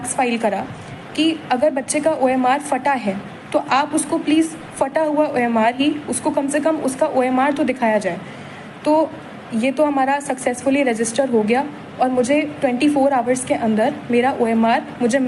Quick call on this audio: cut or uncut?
uncut